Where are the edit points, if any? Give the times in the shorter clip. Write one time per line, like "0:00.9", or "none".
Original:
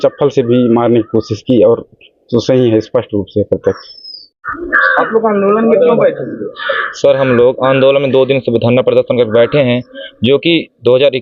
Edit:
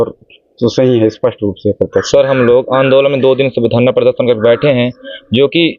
0:02.1